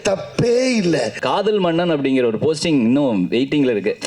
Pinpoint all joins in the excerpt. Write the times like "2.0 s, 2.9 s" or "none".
1.2 s